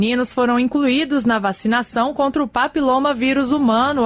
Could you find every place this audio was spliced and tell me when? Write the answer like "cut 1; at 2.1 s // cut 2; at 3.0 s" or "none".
none